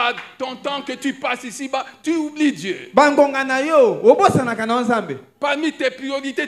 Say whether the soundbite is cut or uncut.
uncut